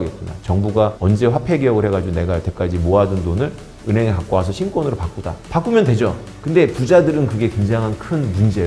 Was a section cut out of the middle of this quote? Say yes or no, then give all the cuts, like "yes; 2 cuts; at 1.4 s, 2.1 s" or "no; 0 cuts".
no; 0 cuts